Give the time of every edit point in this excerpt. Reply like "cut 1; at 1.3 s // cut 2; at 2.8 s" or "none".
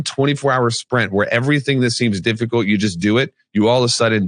none